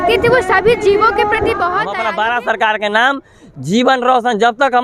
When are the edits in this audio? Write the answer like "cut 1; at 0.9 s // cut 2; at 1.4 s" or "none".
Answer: cut 1; at 2.0 s